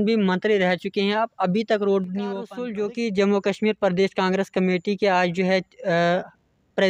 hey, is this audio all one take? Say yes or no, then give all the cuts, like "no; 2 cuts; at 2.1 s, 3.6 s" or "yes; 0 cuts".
no; 1 cut; at 2.6 s